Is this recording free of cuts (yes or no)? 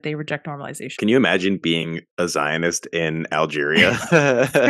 no